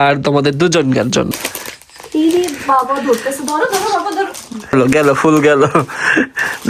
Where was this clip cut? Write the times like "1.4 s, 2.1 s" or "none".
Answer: 1.3 s, 4.7 s

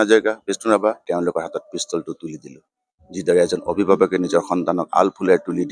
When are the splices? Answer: 1.0 s

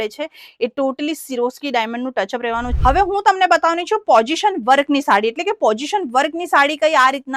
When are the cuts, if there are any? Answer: 2.7 s

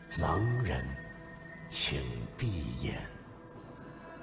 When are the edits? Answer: 3.1 s

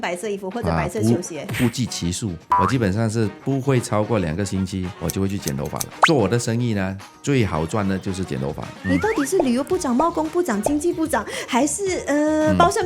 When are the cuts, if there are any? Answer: 2.5 s, 4.9 s, 8.7 s

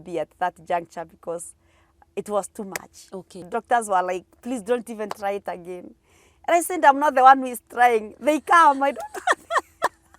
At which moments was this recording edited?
3.4 s

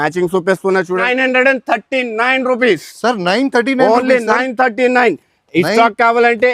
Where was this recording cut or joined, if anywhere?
1.0 s

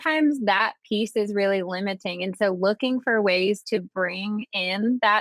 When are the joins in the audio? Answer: none

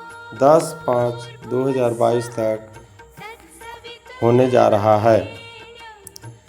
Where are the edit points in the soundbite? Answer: 2.8 s, 4.2 s

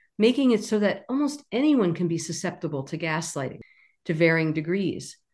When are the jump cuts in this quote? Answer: 3.6 s

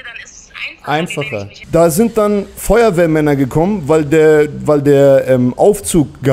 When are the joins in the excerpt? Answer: 1.6 s

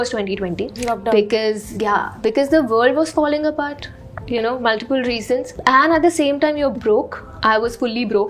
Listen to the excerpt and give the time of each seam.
none

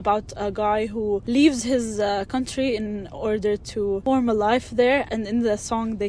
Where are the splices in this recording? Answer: 1.2 s, 4.0 s, 5.1 s

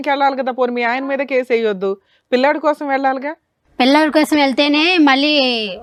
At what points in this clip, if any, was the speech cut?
none

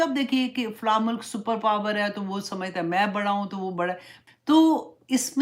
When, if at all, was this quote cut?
4.1 s

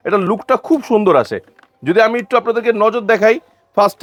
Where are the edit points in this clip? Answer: none

